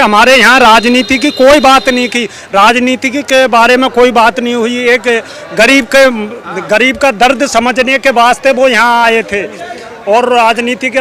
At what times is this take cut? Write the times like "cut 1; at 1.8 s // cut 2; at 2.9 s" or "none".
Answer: none